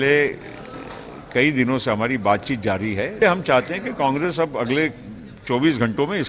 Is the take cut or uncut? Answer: cut